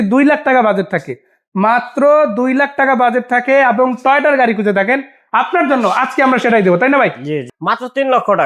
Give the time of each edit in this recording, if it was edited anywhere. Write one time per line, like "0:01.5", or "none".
0:07.5